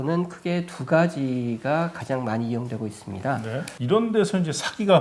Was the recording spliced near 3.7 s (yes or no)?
yes